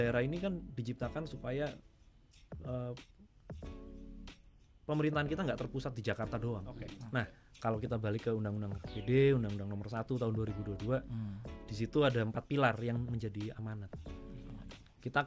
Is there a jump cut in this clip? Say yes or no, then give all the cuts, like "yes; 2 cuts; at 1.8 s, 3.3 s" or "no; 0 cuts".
yes; 2 cuts; at 6.9 s, 14.5 s